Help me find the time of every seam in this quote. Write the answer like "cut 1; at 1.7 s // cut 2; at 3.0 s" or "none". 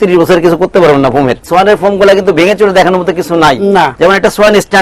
cut 1; at 1.4 s // cut 2; at 3.9 s